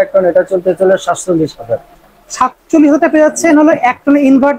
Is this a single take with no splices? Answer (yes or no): yes